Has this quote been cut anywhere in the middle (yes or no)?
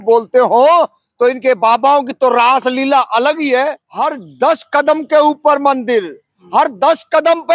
yes